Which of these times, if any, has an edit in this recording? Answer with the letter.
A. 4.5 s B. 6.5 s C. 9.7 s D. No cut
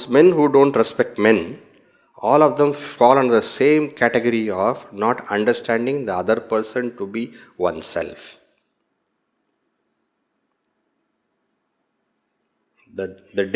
D